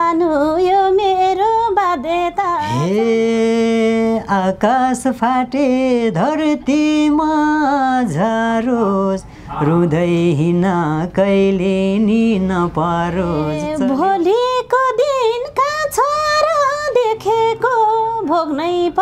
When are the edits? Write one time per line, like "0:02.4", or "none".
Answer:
0:02.7
0:13.6